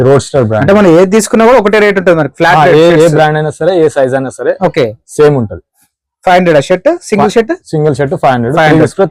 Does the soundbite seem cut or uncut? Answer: uncut